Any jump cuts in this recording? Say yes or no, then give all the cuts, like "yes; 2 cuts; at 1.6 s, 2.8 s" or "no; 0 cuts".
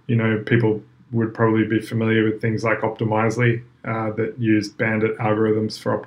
no; 0 cuts